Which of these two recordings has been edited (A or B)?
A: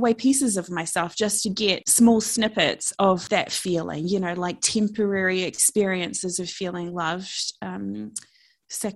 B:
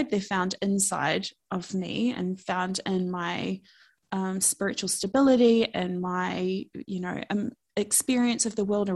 A